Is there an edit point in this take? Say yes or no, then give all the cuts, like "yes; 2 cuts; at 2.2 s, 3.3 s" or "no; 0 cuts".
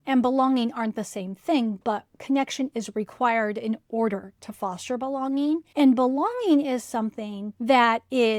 no; 0 cuts